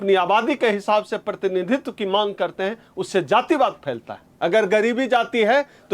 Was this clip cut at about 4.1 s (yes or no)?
yes